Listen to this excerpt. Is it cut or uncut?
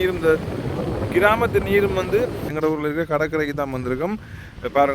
cut